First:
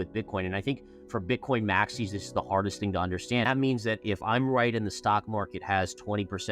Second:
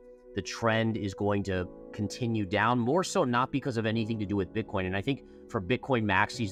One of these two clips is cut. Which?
first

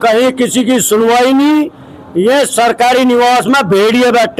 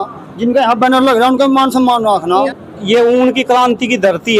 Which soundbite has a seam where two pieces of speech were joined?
second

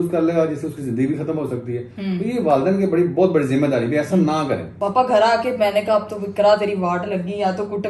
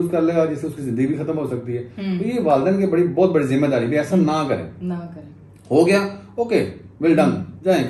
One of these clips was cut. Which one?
first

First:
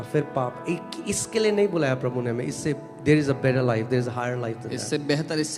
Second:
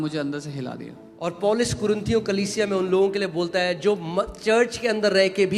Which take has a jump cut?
second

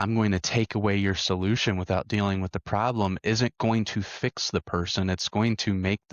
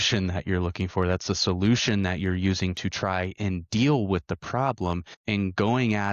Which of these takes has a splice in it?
second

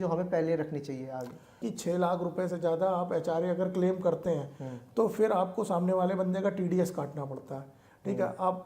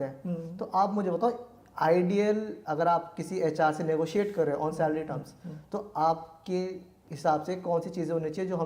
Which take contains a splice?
first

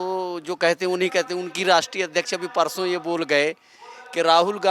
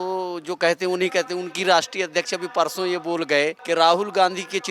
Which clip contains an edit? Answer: second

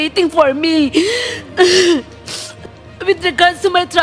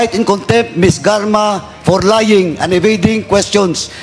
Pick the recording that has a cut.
first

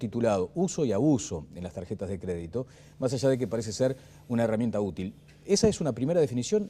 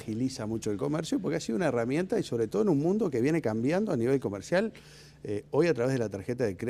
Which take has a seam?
second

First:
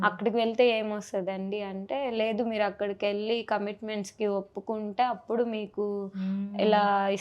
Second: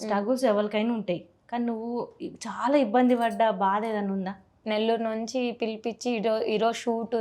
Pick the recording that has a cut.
second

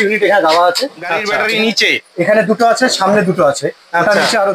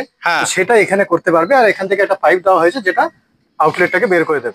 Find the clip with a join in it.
first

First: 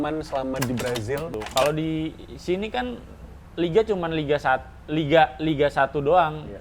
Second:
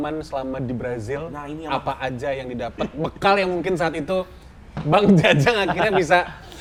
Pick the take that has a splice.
first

